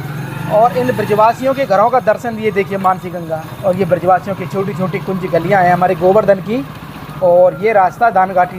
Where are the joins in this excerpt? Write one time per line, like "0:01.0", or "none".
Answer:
none